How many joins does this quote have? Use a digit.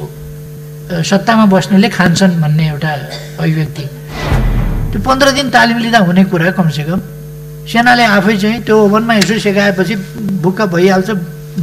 1